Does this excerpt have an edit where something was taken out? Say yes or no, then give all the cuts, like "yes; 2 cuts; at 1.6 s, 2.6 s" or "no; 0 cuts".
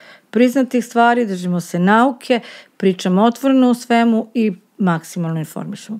no; 0 cuts